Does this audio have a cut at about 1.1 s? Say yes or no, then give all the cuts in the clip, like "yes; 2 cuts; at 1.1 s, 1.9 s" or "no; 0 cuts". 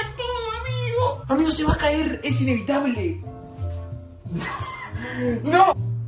no; 1 cut; at 3.2 s